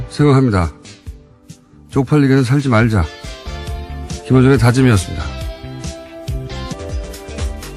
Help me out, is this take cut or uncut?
uncut